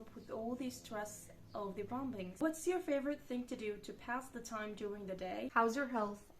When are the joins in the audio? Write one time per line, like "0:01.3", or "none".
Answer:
0:02.3
0:05.5